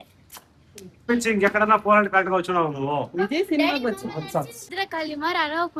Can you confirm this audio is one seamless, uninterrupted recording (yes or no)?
no